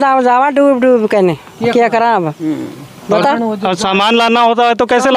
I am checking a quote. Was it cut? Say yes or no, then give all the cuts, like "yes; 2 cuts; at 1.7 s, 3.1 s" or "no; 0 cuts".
no; 0 cuts